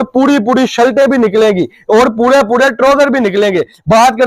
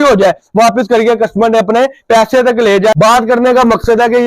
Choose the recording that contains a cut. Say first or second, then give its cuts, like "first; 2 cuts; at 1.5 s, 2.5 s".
second; 1 cut; at 2.9 s